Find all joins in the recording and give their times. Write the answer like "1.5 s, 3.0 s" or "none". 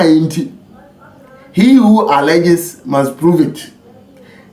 none